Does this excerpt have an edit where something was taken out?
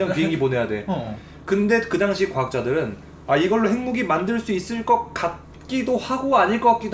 no; 0 cuts

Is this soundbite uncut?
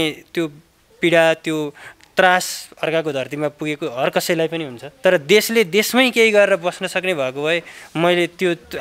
yes; 0 cuts

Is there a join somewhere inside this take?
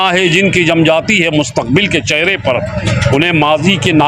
no; 0 cuts

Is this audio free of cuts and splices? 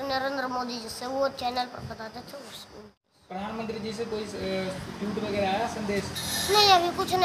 no; 1 cut; at 2.9 s

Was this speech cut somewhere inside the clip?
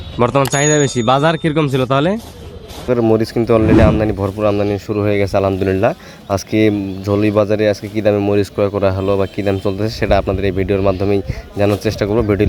yes; 1 cut; at 2.9 s

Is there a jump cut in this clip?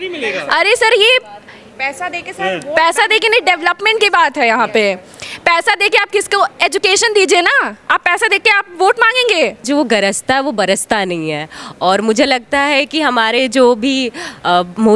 yes; 1 cut; at 9.6 s

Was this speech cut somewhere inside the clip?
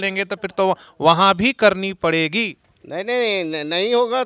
no; 0 cuts

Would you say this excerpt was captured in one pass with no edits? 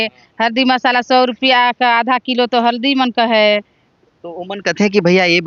yes; 0 cuts

